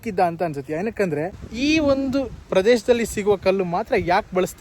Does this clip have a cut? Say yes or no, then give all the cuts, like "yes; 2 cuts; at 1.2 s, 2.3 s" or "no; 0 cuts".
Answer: yes; 1 cut; at 1.4 s